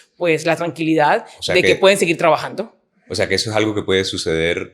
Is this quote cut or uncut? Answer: uncut